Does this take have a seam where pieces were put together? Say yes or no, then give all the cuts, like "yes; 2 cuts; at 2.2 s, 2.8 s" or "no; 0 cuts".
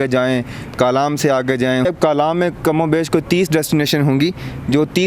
yes; 1 cut; at 1.9 s